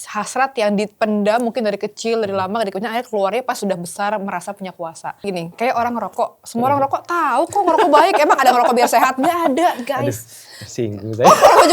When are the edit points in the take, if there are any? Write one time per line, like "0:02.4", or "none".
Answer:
0:05.2